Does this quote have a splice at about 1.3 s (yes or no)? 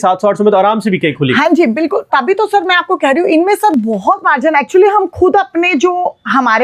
no